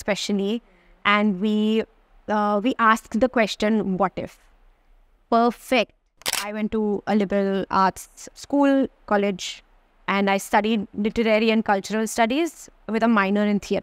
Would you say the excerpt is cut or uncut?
cut